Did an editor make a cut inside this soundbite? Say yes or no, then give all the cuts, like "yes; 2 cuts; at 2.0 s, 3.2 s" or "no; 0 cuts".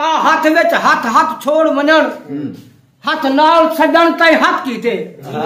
no; 0 cuts